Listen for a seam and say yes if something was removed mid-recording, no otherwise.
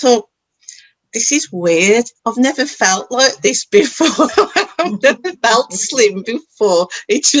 no